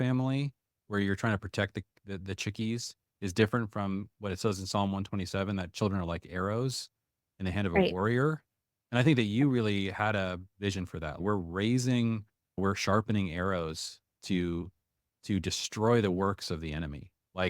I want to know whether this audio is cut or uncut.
cut